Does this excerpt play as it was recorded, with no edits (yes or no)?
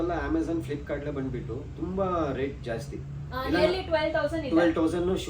yes